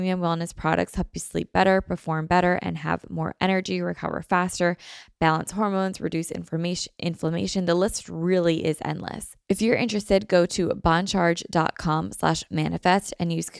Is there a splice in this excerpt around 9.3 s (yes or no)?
yes